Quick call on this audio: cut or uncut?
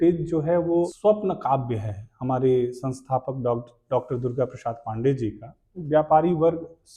cut